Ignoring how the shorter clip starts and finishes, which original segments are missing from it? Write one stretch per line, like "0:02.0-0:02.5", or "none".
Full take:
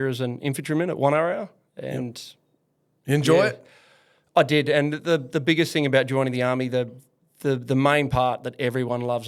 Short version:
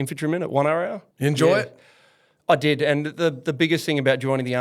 0:01.5-0:02.9